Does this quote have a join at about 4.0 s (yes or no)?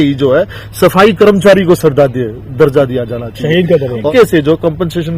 yes